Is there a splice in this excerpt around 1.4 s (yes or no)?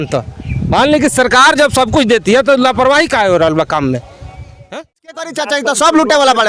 no